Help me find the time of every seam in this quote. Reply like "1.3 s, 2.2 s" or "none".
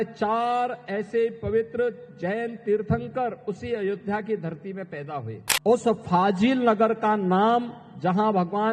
5.4 s